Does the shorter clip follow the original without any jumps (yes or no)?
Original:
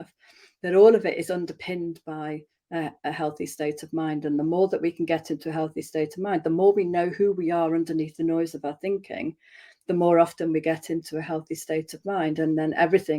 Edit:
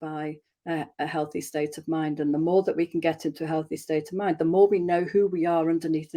yes